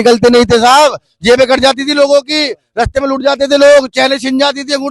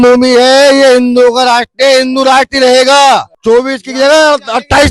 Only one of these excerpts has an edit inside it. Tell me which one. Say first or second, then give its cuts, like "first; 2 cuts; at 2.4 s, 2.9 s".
second; 1 cut; at 3.3 s